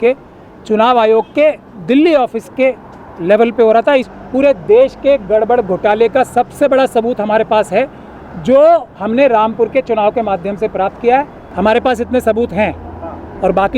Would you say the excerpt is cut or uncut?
cut